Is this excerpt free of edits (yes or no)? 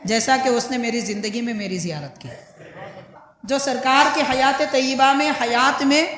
yes